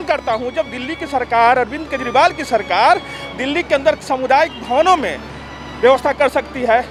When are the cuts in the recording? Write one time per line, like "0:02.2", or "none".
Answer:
none